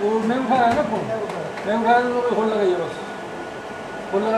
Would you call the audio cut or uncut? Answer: uncut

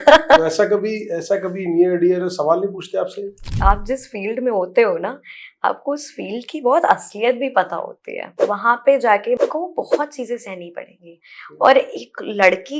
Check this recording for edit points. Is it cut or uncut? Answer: cut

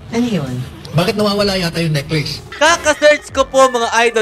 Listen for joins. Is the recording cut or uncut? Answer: cut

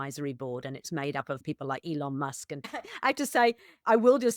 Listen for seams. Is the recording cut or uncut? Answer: cut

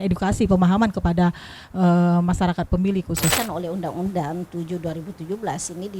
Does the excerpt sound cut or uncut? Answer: cut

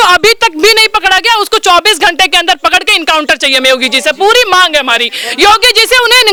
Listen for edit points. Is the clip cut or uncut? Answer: uncut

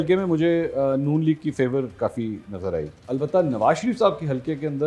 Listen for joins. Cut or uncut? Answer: cut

